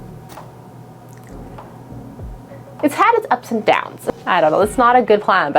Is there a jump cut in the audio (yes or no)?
yes